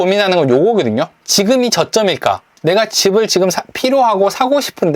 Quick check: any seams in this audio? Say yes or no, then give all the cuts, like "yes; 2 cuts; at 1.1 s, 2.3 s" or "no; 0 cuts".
yes; 2 cuts; at 1.2 s, 2.5 s